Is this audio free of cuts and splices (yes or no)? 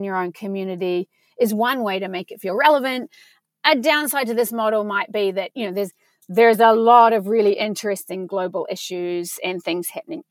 yes